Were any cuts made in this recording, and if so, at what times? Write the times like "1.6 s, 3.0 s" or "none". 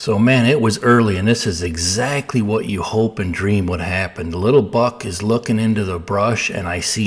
none